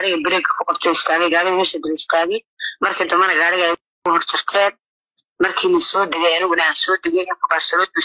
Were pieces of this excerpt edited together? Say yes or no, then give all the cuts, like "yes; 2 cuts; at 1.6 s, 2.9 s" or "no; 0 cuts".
no; 0 cuts